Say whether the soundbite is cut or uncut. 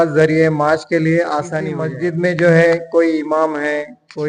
cut